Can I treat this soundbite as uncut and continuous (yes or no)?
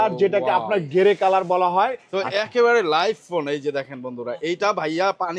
no